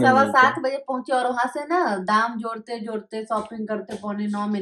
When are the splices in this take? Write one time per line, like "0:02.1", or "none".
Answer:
none